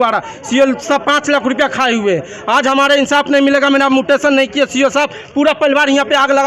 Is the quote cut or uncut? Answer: uncut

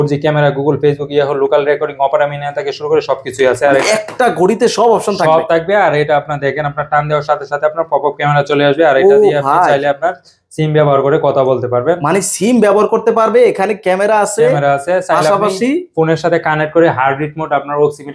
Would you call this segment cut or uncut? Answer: uncut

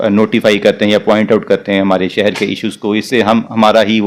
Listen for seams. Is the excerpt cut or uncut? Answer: uncut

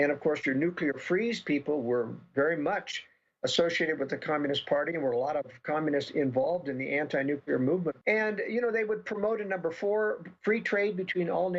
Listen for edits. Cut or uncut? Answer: cut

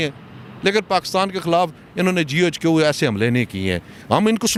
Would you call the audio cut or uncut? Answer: uncut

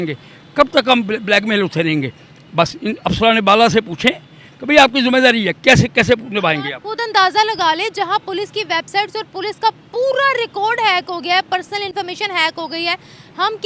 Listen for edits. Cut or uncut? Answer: uncut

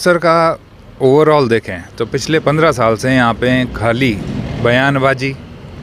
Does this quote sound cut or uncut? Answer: uncut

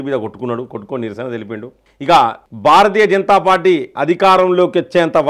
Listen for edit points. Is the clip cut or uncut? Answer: cut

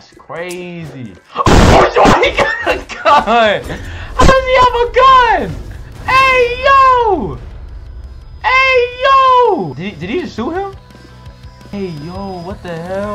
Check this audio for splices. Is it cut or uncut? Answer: cut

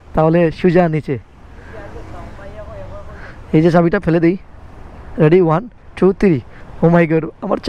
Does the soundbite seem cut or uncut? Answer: uncut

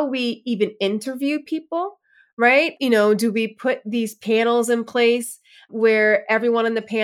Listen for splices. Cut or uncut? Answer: cut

